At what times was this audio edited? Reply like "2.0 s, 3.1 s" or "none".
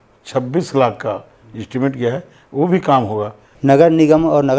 3.4 s